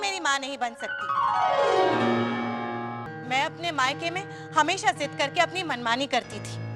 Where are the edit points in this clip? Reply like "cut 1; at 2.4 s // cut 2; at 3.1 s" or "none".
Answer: cut 1; at 3.1 s

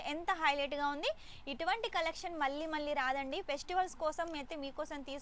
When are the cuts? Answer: none

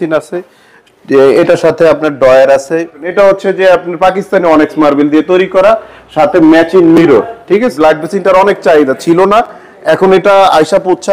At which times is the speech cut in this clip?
cut 1; at 3.0 s // cut 2; at 7.7 s

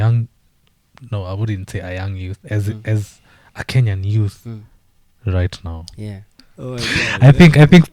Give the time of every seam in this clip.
cut 1; at 6.5 s

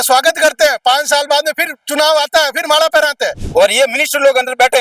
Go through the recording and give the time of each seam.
cut 1; at 3.4 s

